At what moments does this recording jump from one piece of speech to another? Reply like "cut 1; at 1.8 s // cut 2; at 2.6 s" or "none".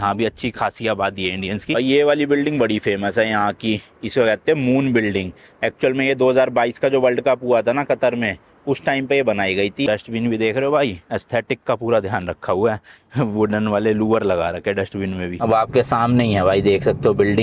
cut 1; at 1.7 s // cut 2; at 9.9 s // cut 3; at 15.4 s